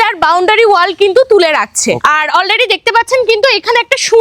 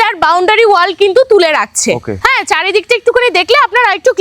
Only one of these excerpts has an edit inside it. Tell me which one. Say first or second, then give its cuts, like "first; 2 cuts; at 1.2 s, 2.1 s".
first; 1 cut; at 2.0 s